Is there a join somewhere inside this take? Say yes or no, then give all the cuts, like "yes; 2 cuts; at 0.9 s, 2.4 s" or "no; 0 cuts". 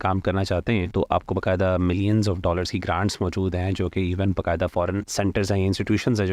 yes; 2 cuts; at 0.9 s, 5.1 s